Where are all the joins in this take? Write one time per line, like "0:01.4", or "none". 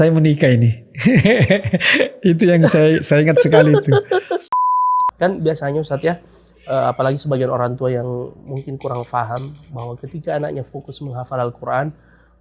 0:04.6